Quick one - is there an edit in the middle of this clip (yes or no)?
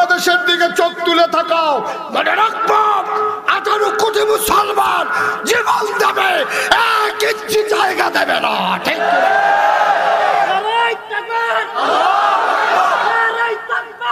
no